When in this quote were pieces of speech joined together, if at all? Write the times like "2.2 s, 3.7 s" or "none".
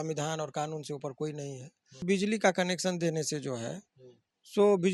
2.0 s